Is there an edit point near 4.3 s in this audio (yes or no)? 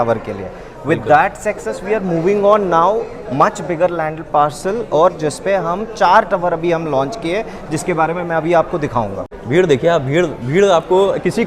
no